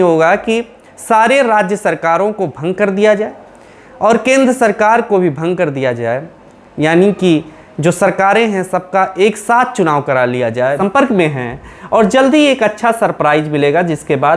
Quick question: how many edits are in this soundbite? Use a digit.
1